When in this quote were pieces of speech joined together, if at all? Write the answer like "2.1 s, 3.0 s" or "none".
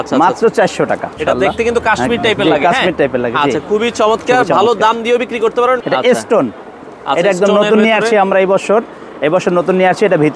1.2 s, 5.8 s